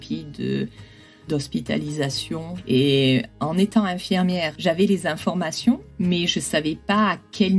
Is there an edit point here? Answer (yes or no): yes